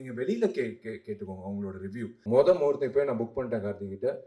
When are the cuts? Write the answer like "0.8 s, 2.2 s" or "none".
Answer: 2.1 s